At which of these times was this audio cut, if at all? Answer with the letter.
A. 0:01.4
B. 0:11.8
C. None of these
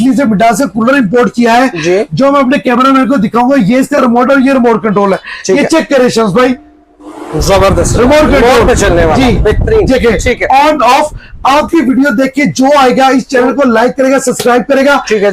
C